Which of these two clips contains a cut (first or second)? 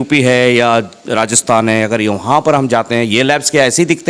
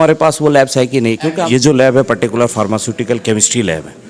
second